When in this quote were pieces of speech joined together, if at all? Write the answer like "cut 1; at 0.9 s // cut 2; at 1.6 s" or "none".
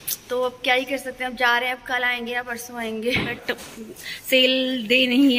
none

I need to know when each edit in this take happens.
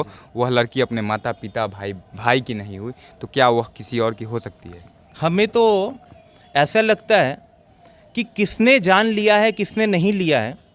none

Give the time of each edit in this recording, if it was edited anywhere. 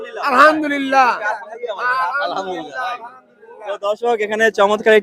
none

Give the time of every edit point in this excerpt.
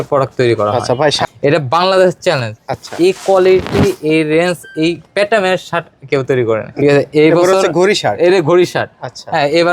cut 1; at 1.2 s // cut 2; at 6.7 s

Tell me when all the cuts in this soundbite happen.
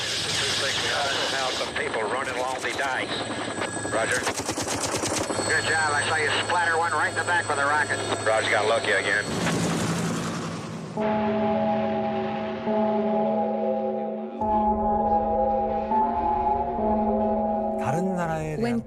cut 1; at 16.9 s

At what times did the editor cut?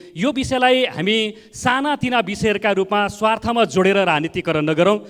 none

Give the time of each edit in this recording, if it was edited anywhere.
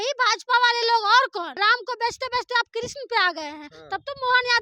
cut 1; at 1.6 s

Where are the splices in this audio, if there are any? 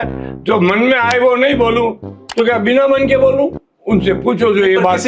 none

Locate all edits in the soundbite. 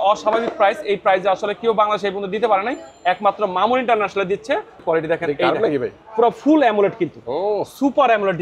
cut 1; at 4.8 s

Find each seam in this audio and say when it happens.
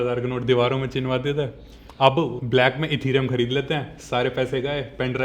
cut 1; at 2.4 s

